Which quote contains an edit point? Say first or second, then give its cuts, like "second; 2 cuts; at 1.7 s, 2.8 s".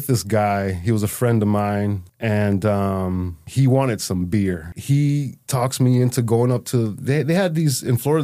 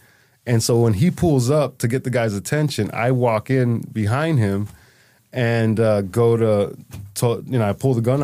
first; 4 cuts; at 2.1 s, 3.4 s, 4.7 s, 5.4 s